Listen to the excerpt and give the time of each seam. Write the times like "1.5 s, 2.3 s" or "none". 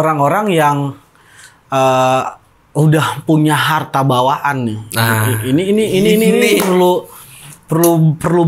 none